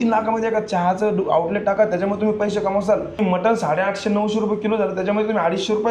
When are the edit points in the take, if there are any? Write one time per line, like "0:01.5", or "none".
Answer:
0:03.2